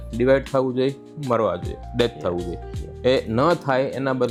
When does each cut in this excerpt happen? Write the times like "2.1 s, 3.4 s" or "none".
none